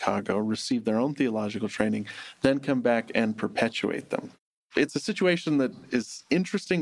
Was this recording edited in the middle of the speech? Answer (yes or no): yes